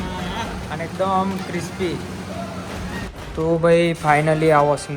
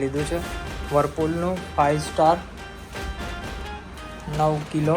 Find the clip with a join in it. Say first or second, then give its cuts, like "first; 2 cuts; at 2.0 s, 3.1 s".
first; 1 cut; at 3.1 s